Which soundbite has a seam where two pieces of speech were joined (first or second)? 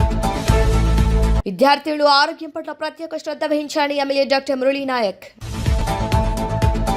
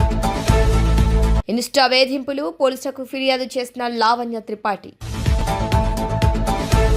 first